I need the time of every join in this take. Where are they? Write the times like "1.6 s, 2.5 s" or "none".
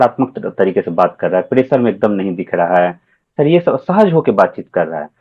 none